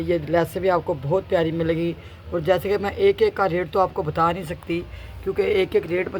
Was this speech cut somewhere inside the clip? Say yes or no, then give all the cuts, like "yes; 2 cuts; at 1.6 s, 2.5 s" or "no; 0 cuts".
no; 0 cuts